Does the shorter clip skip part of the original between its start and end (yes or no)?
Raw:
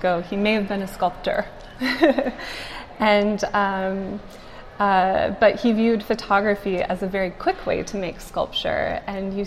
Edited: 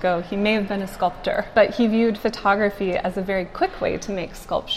yes